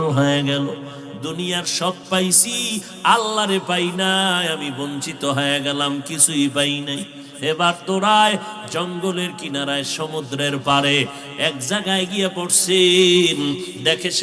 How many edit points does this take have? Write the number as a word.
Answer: zero